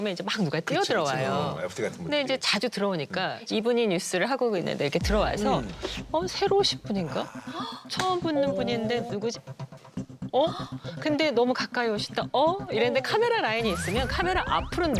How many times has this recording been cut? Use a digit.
1